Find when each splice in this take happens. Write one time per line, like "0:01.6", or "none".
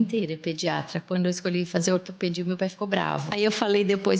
0:03.2